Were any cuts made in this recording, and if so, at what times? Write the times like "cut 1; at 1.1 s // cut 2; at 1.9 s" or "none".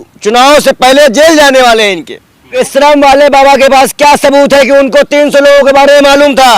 cut 1; at 2.5 s